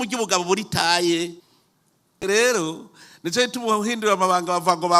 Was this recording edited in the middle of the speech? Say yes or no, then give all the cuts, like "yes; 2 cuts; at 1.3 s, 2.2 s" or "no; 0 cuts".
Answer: yes; 1 cut; at 2.2 s